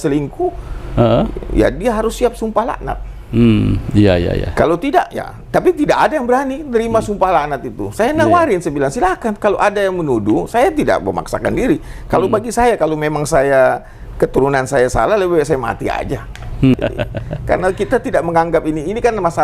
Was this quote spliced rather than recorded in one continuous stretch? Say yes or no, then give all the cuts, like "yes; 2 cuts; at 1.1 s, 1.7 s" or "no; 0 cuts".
yes; 1 cut; at 16.7 s